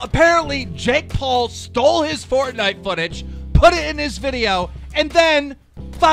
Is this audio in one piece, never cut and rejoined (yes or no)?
yes